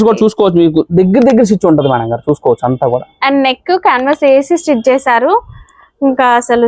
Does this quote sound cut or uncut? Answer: uncut